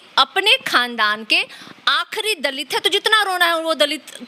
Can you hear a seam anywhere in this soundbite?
no; 0 cuts

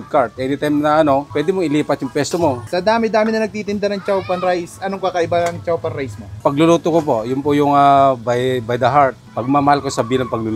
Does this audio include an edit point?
yes; 2 cuts; at 2.6 s, 6.4 s

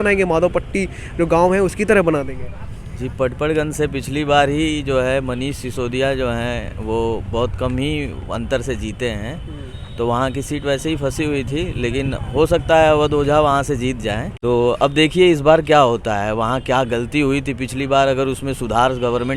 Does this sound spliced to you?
yes; 1 cut; at 14.3 s

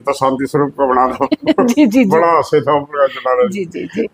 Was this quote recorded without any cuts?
yes; 0 cuts

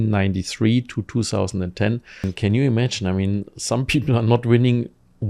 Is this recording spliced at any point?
yes; 1 cut; at 2.3 s

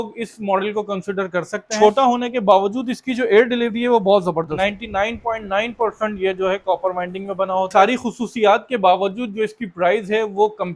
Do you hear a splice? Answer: yes; 3 cuts; at 1.7 s, 4.5 s, 7.7 s

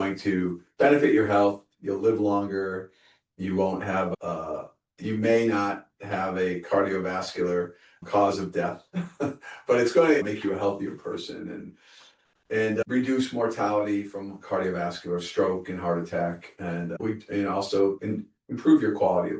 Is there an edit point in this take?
yes; 4 cuts; at 4.1 s, 10.2 s, 17.0 s, 18.0 s

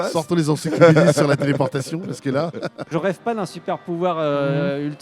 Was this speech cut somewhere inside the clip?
yes; 1 cut; at 2.9 s

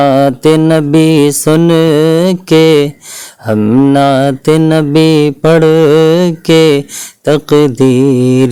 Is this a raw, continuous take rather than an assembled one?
yes; 0 cuts

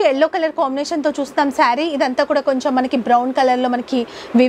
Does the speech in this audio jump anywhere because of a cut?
no; 0 cuts

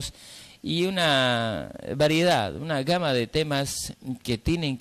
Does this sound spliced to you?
yes; 1 cut; at 3.3 s

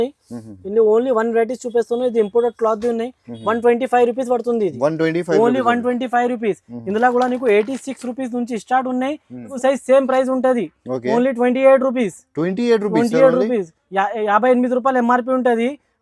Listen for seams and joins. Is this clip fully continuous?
no; 1 cut; at 9.6 s

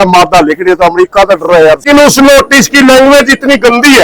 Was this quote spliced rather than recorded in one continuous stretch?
yes; 1 cut; at 1.8 s

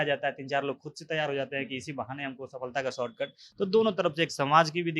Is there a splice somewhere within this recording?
no; 0 cuts

